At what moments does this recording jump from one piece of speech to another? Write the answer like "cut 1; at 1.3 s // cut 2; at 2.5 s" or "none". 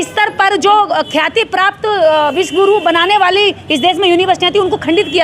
none